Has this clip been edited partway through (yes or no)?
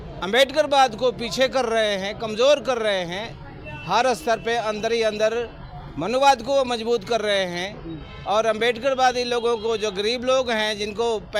no